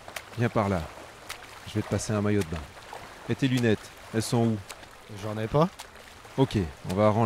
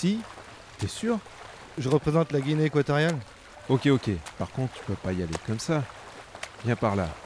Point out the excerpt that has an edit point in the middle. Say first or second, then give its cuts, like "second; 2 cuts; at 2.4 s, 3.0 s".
second; 1 cut; at 1.9 s